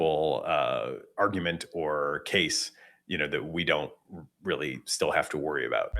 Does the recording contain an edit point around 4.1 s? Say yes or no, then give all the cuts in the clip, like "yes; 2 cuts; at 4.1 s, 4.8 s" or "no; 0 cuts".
no; 1 cut; at 2.2 s